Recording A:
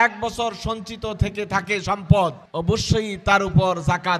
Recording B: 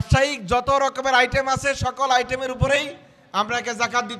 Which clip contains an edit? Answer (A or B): A